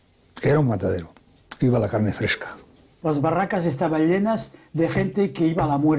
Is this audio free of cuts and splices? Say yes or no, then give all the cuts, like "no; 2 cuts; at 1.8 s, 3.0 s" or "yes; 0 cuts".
no; 1 cut; at 2.9 s